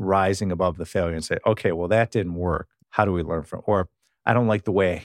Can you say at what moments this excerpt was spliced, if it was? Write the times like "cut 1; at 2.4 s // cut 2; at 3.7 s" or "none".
cut 1; at 2.8 s